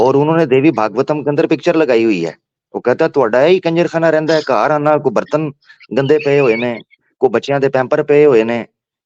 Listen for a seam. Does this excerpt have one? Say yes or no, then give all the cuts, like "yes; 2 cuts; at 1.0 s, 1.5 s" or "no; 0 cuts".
no; 0 cuts